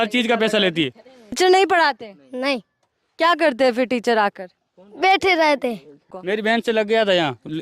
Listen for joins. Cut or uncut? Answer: cut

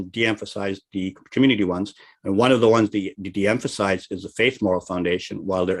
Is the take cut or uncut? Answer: uncut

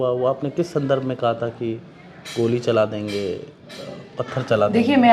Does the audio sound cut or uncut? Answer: uncut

